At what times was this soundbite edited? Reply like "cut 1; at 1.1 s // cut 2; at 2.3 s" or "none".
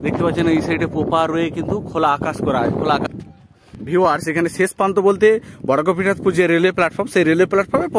cut 1; at 3.1 s